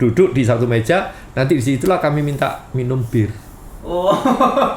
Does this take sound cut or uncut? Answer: uncut